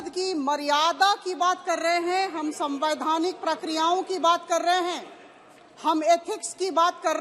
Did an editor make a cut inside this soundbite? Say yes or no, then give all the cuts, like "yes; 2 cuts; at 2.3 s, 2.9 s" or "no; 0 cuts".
no; 0 cuts